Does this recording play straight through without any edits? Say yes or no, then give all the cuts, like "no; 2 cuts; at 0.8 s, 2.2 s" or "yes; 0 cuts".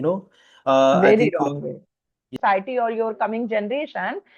no; 1 cut; at 2.3 s